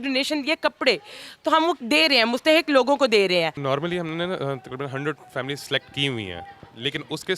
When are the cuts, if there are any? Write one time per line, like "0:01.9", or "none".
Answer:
0:03.6